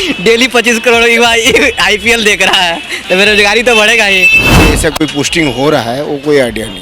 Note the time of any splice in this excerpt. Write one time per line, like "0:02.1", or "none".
0:04.6